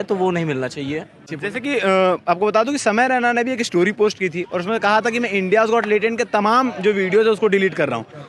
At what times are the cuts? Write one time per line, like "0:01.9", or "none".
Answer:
0:01.3